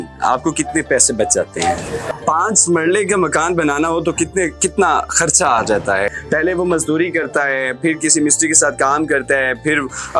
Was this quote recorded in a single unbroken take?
no; 2 cuts; at 2.1 s, 6.1 s

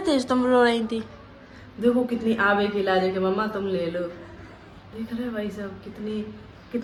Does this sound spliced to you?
no; 0 cuts

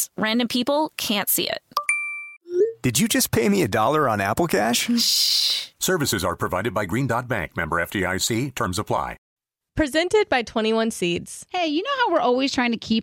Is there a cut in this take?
yes; 1 cut; at 9.2 s

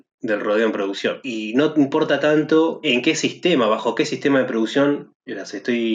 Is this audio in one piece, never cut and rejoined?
no; 2 cuts; at 1.2 s, 2.9 s

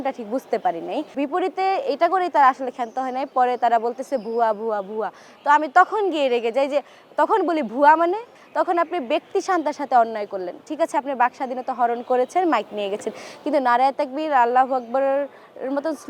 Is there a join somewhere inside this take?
yes; 2 cuts; at 1.1 s, 8.4 s

